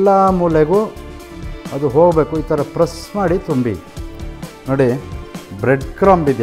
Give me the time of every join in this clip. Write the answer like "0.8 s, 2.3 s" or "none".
4.4 s